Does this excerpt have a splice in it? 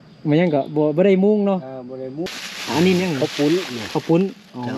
yes; 1 cut; at 2.2 s

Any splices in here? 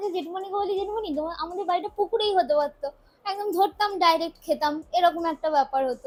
no; 0 cuts

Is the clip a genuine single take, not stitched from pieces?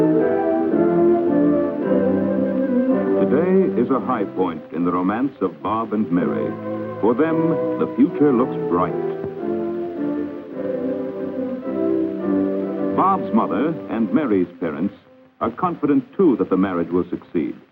yes; 0 cuts

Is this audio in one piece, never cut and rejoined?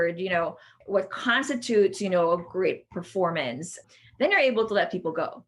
no; 2 cuts; at 0.8 s, 3.8 s

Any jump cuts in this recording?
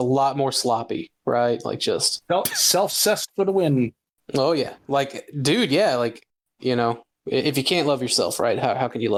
no; 0 cuts

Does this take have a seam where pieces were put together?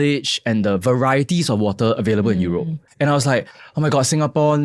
yes; 1 cut; at 2.8 s

